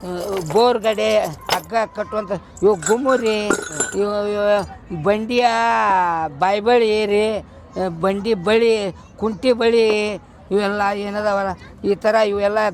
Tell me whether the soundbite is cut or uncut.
cut